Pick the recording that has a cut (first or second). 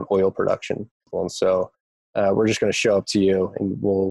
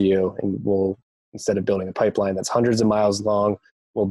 first